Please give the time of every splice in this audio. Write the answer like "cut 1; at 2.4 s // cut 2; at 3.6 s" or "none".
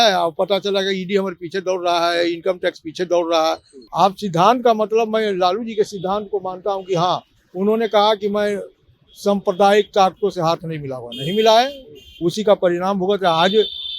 cut 1; at 3.7 s